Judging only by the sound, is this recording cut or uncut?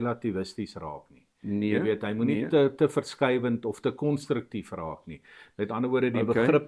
uncut